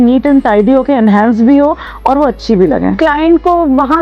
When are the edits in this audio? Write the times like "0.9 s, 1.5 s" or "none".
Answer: 2.9 s